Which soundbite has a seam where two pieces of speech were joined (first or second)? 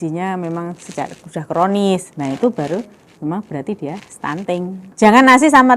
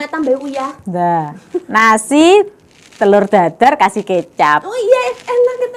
first